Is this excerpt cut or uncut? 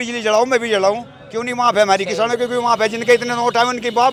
uncut